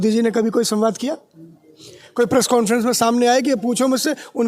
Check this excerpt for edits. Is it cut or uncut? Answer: uncut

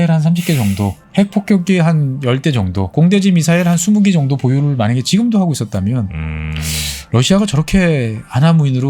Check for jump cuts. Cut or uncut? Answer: cut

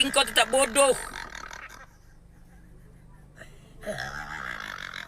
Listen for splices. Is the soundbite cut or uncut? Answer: uncut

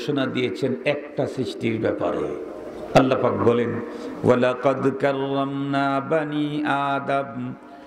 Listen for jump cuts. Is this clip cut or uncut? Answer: uncut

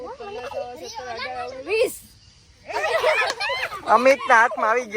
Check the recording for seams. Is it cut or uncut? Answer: uncut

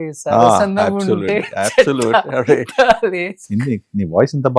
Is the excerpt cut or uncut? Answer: uncut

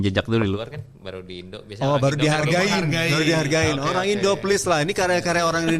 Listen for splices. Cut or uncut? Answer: uncut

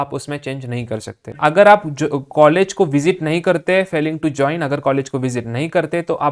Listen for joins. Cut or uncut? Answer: cut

